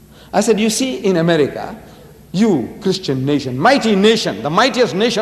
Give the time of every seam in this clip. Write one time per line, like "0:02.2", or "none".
0:02.7